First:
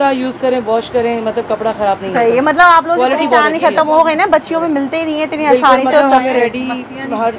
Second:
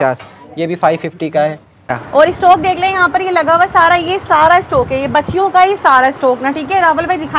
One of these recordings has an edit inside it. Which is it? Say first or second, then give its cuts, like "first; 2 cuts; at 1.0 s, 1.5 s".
second; 1 cut; at 1.9 s